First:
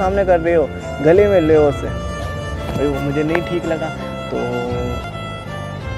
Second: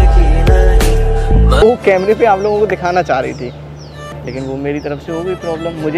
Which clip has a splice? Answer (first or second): second